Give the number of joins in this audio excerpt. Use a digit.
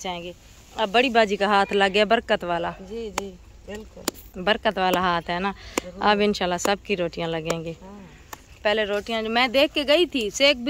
0